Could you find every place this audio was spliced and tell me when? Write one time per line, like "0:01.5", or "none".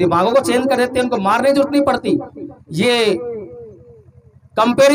none

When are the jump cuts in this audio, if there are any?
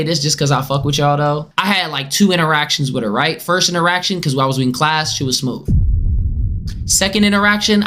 0:01.5

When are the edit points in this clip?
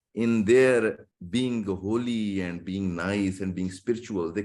0:01.1

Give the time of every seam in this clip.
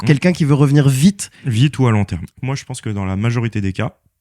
0:01.4
0:02.4

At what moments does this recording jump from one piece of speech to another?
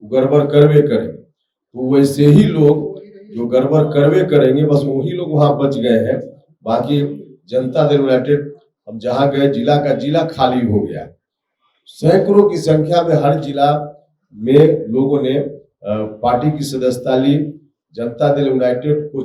none

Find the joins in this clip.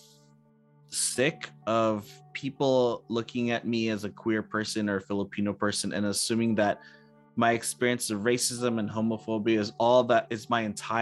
none

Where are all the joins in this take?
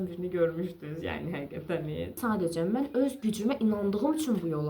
0:02.2

